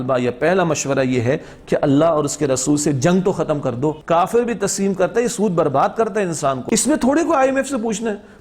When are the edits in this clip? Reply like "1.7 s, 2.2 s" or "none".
4.0 s, 6.6 s